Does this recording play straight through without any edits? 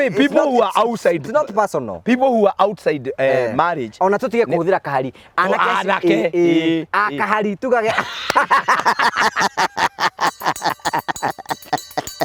yes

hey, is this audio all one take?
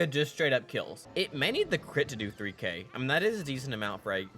no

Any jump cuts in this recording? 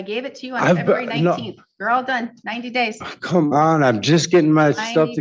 no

